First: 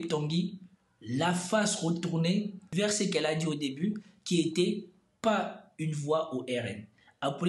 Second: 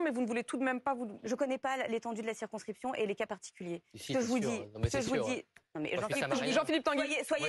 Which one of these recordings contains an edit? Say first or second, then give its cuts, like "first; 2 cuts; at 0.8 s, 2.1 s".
first; 1 cut; at 3.0 s